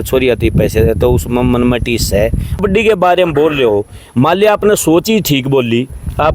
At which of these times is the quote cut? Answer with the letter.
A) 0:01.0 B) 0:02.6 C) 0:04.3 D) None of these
B